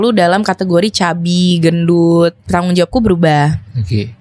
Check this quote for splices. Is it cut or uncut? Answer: cut